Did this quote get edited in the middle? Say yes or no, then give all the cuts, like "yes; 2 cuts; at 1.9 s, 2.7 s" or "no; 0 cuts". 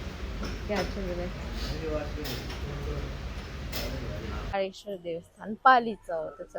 yes; 1 cut; at 4.5 s